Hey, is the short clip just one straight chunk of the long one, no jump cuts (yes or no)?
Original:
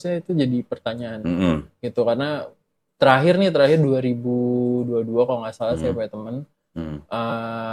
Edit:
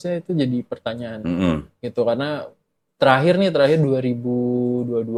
yes